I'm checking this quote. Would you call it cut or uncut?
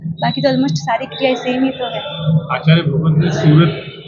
uncut